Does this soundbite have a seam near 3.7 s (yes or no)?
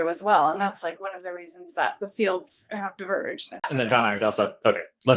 yes